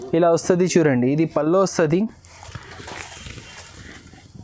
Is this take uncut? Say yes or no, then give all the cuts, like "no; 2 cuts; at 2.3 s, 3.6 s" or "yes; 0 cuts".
yes; 0 cuts